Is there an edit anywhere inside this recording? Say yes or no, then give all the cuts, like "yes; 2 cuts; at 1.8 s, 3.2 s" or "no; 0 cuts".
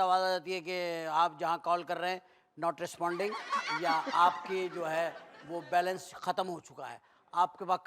no; 0 cuts